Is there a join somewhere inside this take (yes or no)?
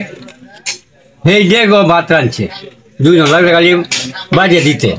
no